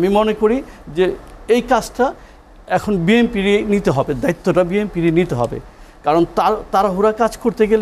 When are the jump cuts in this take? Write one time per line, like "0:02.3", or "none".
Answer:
none